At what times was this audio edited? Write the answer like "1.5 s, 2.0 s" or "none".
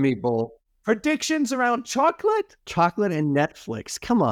2.6 s